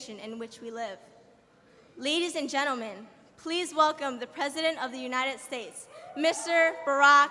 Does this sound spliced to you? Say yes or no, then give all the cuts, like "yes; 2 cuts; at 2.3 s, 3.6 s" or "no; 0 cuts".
no; 0 cuts